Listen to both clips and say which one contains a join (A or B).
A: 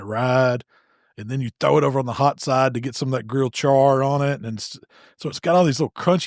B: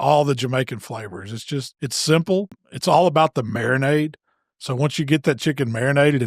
B